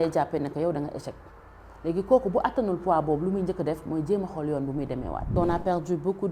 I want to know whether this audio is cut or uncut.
cut